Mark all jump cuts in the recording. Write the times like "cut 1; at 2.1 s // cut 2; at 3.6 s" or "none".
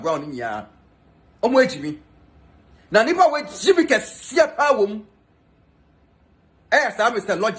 none